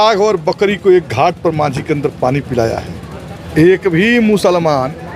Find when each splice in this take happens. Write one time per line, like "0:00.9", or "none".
0:02.9